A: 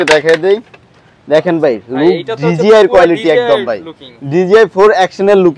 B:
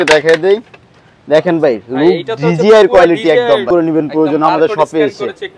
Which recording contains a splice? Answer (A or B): B